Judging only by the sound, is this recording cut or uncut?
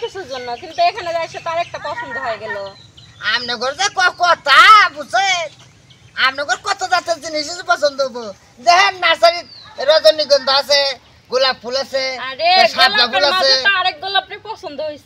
uncut